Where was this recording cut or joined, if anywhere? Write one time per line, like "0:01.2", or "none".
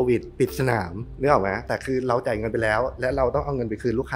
0:01.0
0:01.6